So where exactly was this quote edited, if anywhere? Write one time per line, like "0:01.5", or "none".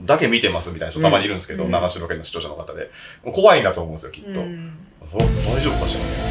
none